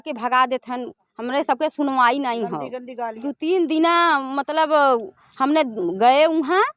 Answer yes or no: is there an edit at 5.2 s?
no